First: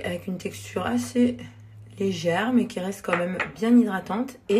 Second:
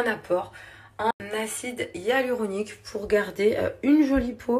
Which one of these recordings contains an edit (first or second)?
second